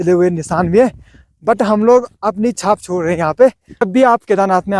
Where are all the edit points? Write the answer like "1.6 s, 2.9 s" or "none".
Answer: 3.7 s